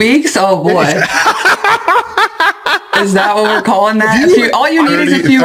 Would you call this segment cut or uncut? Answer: uncut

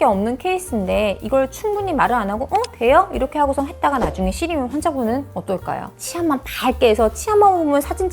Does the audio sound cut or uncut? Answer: cut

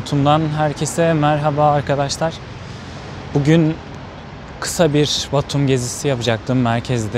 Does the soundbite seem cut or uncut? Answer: uncut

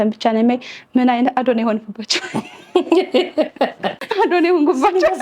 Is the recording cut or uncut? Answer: cut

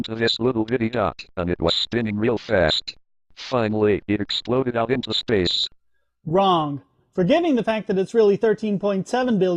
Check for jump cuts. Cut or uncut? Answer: uncut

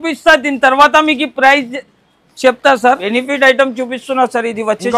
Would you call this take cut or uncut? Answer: cut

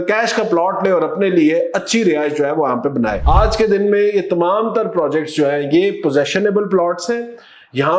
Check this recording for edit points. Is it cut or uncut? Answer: cut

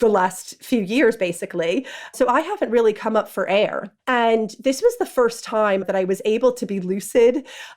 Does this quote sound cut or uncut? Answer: cut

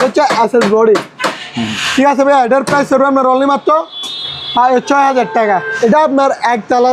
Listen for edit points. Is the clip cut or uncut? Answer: cut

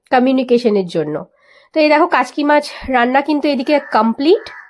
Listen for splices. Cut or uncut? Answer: uncut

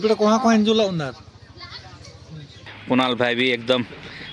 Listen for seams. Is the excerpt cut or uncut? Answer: cut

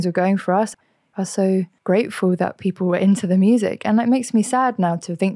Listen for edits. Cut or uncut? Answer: cut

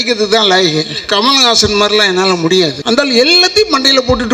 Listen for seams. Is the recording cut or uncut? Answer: cut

